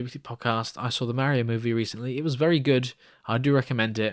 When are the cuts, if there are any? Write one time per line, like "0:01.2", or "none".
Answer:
none

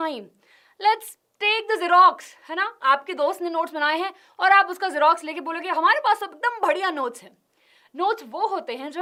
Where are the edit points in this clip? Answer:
none

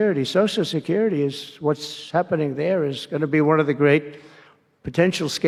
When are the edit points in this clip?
none

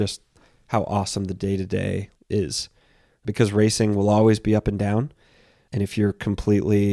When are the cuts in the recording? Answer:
0:02.1
0:03.2
0:05.6

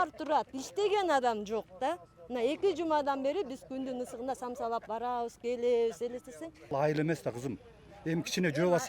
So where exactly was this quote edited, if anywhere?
0:06.7

